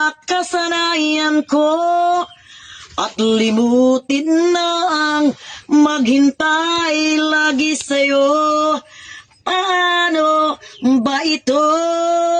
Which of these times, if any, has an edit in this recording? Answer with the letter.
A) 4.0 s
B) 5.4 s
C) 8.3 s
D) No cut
D